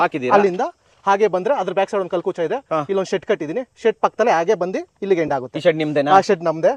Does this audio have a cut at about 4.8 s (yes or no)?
no